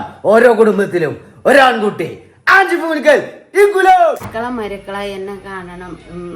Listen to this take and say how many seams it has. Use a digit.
1